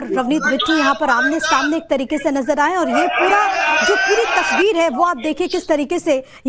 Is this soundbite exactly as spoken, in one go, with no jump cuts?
no; 1 cut; at 4.3 s

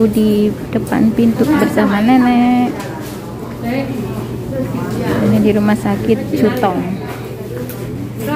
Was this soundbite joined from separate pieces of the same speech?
no; 0 cuts

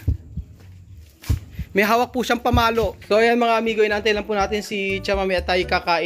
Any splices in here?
yes; 1 cut; at 3.0 s

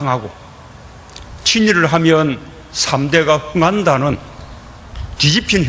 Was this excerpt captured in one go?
yes; 0 cuts

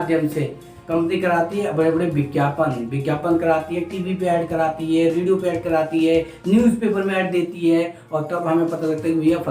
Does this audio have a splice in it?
no; 0 cuts

